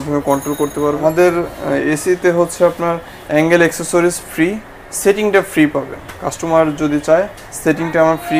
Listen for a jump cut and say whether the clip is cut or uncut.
cut